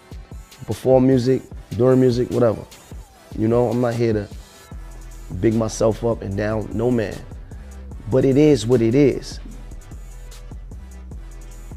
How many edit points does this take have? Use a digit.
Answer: 1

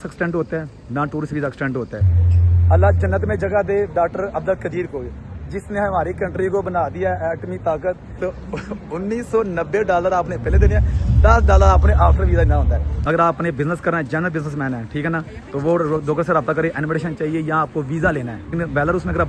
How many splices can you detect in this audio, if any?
4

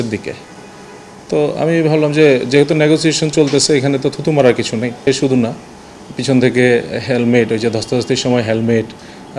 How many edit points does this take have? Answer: 1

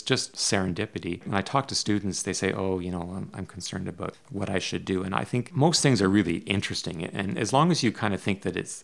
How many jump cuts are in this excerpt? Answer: 0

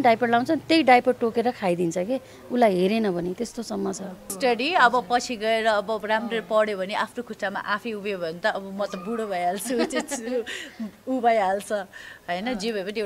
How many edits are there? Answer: 1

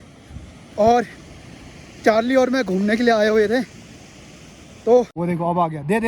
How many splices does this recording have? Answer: 1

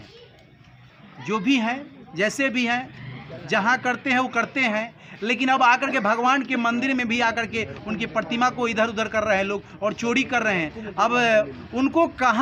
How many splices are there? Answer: 0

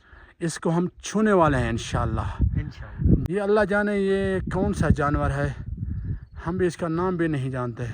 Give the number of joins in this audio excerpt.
1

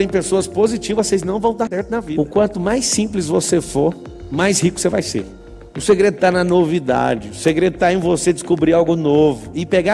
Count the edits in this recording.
2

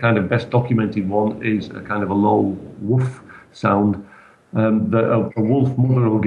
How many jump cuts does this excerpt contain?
1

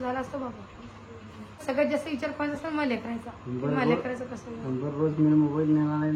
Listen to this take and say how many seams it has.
1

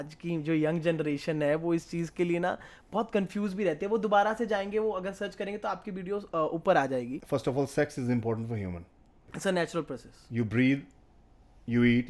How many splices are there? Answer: 2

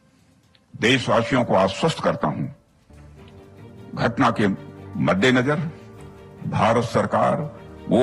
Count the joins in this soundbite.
2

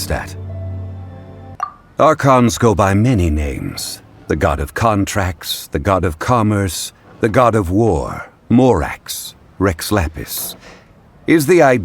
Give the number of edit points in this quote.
1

